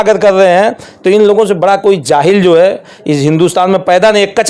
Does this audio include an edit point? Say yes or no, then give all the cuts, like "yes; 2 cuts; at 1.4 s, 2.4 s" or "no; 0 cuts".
no; 0 cuts